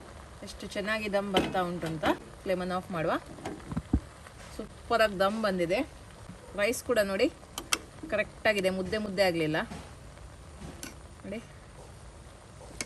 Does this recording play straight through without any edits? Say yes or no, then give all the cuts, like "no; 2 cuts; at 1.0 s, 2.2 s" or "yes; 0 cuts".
yes; 0 cuts